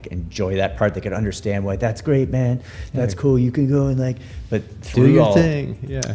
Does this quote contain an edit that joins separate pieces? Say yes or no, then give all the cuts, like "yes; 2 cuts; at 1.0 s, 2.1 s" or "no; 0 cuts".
no; 0 cuts